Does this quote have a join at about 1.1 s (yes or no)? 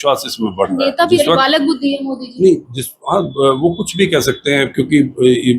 yes